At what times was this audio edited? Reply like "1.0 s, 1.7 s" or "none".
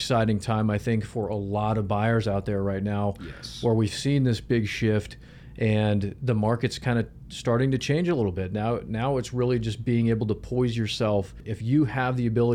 11.5 s